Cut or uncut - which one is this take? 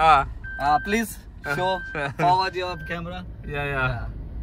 uncut